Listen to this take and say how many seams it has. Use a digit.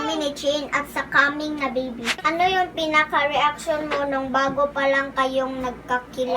1